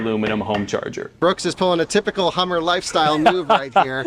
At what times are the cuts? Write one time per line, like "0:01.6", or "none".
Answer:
0:01.2